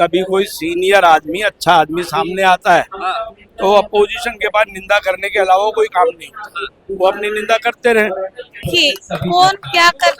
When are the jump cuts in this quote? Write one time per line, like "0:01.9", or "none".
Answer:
0:08.6

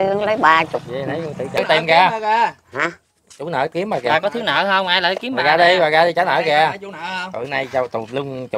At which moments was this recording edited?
0:01.6

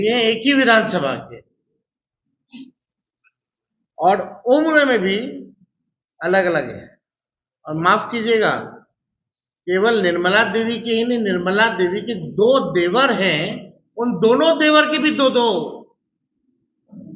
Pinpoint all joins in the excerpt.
none

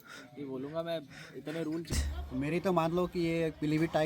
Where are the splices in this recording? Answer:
0:02.0

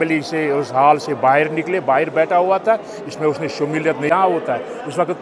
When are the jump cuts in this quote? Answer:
0:04.1

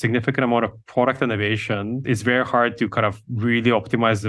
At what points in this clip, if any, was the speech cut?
none

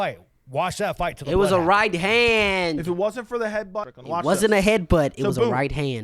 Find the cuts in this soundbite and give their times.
0:03.9

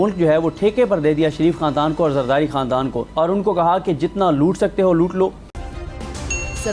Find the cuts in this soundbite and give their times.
0:03.0
0:05.5

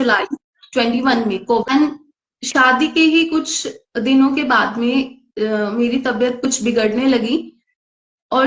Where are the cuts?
0:01.7

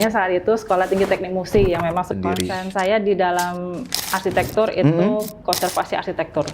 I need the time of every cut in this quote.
0:02.1

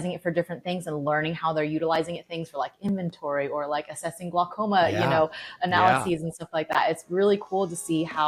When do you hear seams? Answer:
none

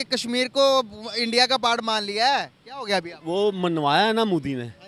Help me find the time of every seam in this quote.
none

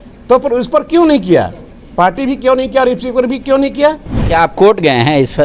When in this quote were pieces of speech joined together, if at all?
0:04.1

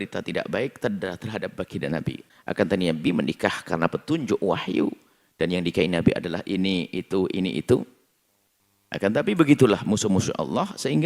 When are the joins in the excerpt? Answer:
0:02.3

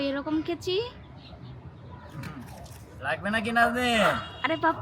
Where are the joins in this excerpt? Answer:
none

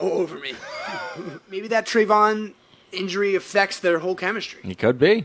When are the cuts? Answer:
0:01.5

